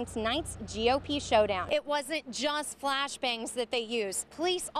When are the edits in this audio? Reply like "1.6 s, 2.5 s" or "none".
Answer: 1.6 s